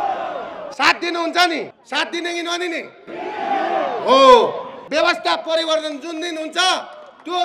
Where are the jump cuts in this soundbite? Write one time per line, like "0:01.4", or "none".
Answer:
0:01.8
0:04.7

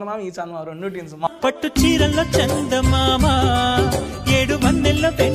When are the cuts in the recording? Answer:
0:01.3

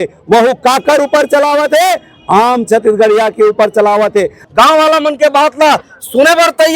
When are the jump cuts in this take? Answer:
0:04.4

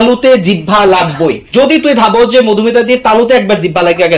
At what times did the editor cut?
0:01.4

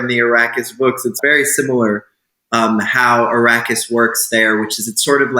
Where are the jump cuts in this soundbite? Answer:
0:01.2

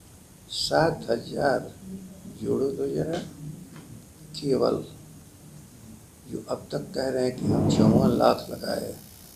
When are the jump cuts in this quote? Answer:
none

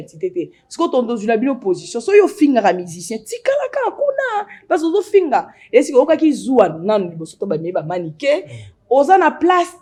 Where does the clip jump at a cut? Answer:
none

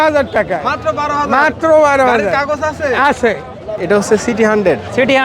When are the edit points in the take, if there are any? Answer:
0:03.8

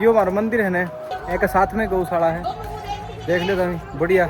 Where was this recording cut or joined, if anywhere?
none

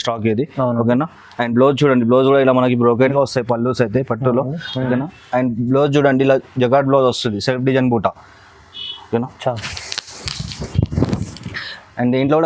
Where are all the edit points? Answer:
0:03.1

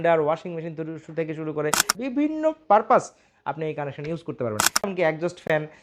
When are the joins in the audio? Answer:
0:02.0
0:04.9

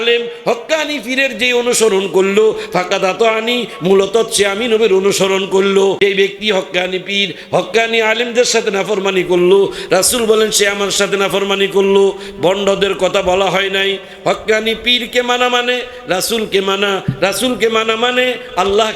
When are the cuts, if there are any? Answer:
0:06.0

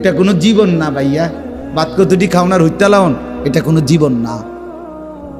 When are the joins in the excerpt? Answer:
0:04.4

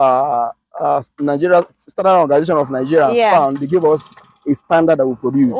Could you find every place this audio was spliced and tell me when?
none

